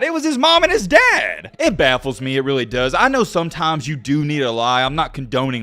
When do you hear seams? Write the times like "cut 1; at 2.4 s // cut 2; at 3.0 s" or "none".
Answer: cut 1; at 1.4 s